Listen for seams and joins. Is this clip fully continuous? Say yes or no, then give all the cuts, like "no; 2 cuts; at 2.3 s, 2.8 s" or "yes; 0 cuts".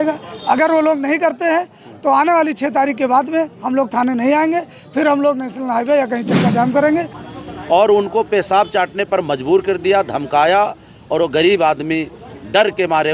no; 1 cut; at 7.2 s